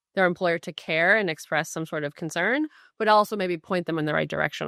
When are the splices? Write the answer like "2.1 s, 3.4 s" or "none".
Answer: none

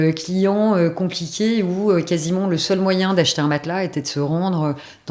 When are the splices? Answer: none

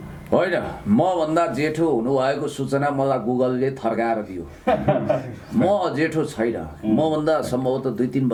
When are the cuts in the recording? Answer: none

